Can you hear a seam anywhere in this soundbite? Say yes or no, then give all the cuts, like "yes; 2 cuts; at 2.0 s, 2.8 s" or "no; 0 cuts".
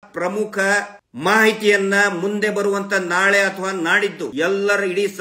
yes; 2 cuts; at 1.0 s, 4.3 s